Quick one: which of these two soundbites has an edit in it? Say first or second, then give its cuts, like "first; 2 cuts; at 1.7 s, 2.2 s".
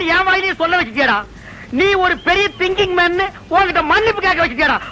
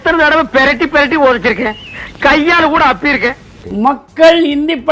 second; 1 cut; at 3.7 s